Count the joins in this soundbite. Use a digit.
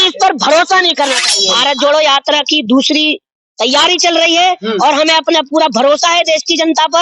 1